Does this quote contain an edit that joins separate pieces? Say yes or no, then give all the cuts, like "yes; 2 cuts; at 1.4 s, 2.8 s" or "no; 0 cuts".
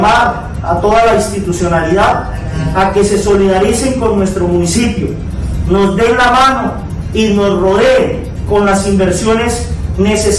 no; 0 cuts